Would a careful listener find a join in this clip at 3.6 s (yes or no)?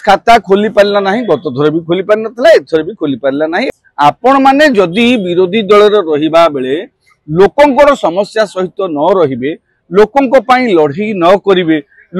yes